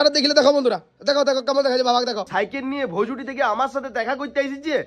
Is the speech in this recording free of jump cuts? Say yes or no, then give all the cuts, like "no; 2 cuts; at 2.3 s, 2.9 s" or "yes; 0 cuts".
no; 1 cut; at 2.3 s